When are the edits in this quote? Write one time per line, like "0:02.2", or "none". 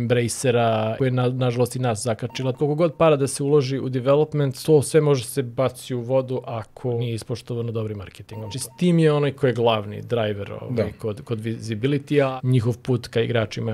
0:01.0
0:02.5
0:04.5
0:07.0
0:08.6
0:12.3